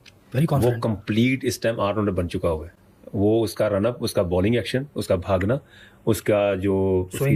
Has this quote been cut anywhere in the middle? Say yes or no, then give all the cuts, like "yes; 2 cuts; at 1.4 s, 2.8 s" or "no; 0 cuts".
no; 0 cuts